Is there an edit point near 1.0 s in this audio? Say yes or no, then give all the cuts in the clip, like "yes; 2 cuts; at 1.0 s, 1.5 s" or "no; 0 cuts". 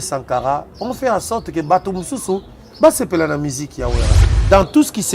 no; 1 cut; at 4.1 s